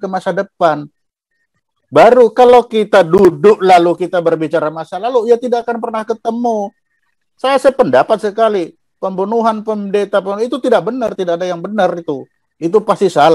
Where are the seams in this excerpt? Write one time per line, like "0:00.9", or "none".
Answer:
none